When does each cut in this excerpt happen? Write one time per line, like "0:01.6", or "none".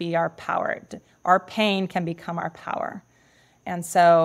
none